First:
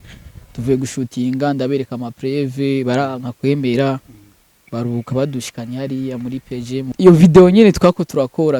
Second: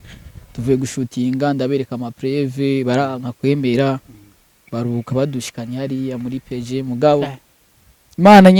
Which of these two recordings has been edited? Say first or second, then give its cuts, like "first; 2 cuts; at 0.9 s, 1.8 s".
first; 1 cut; at 6.8 s